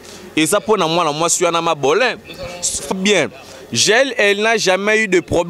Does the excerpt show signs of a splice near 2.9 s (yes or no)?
yes